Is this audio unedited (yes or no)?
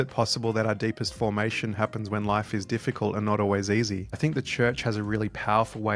no